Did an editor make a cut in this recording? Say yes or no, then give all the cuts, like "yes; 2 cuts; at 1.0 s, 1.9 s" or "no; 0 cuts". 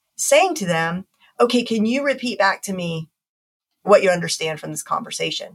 no; 0 cuts